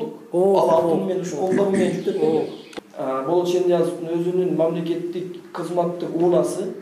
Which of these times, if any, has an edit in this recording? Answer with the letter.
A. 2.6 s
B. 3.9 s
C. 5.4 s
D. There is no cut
A